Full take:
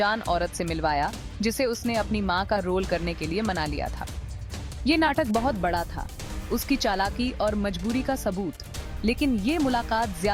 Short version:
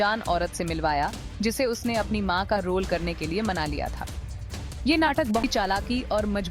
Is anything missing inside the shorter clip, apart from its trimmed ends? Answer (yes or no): yes